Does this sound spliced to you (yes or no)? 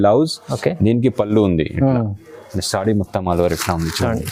no